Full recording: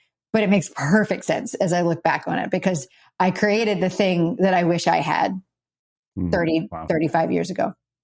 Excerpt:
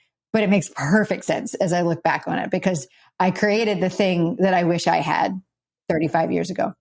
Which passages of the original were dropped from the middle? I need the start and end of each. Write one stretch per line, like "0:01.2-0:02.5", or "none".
0:05.7-0:06.7